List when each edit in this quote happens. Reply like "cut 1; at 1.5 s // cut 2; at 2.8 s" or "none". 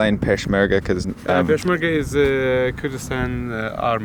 none

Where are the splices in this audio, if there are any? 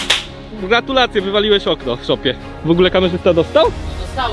none

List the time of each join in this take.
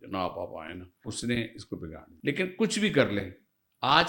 cut 1; at 1.1 s // cut 2; at 2.1 s

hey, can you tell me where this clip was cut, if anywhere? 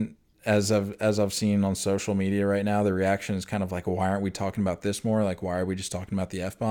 none

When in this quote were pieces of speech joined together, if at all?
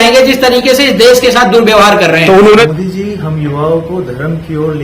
cut 1; at 2.4 s

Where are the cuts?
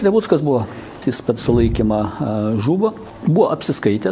cut 1; at 1.0 s // cut 2; at 3.1 s

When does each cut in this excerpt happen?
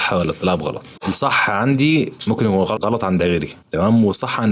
cut 1; at 0.9 s // cut 2; at 2.8 s

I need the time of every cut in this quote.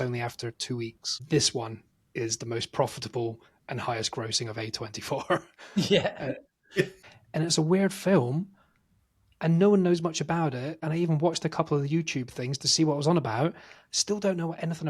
cut 1; at 1.2 s // cut 2; at 7.0 s // cut 3; at 10.8 s

